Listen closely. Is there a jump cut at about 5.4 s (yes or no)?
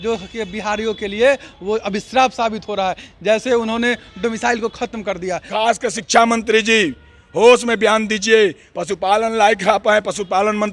yes